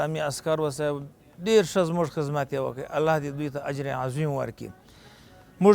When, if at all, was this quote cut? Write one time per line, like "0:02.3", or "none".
none

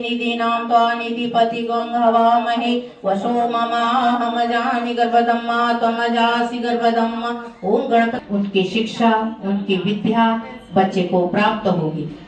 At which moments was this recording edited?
0:08.2

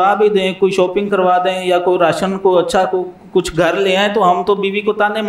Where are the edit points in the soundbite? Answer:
none

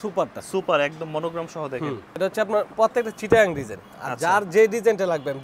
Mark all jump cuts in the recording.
0:02.1

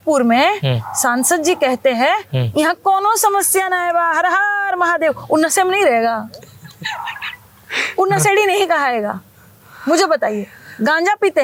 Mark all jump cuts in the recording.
none

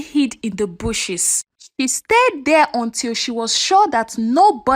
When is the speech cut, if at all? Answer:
none

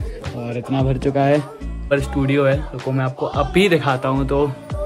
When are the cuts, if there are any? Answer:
0:01.9

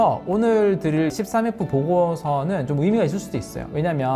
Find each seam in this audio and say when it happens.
0:01.1

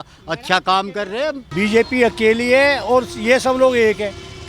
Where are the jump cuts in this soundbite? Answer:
0:01.4

